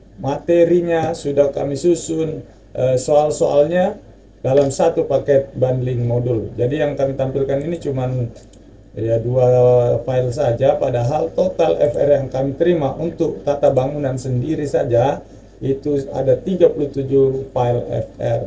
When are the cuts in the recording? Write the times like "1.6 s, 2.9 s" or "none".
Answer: none